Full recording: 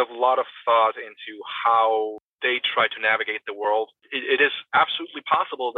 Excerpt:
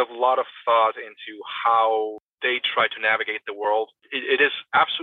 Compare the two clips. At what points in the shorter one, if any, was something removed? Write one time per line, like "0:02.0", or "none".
none